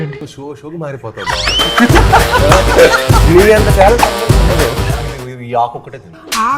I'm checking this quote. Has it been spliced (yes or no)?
yes